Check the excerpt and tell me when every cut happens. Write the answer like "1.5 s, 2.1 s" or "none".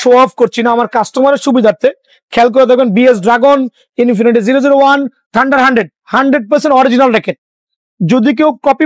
none